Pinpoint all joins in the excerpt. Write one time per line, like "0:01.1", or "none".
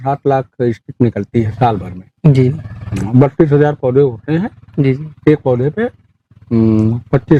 none